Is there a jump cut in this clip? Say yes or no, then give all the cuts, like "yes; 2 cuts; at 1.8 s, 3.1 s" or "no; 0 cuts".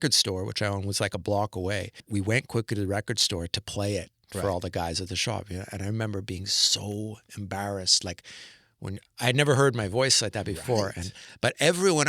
yes; 1 cut; at 2.0 s